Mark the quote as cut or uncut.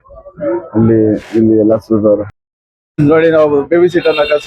cut